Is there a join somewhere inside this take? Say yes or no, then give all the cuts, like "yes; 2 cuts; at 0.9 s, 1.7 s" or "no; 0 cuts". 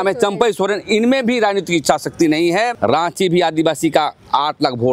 yes; 1 cut; at 2.7 s